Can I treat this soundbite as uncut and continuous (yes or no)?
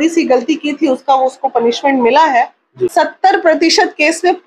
no